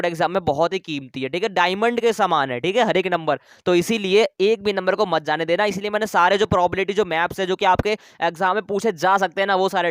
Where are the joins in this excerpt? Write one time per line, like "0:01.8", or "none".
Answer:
none